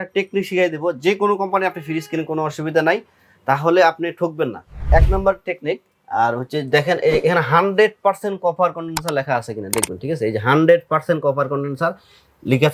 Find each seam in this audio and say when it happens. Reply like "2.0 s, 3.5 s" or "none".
none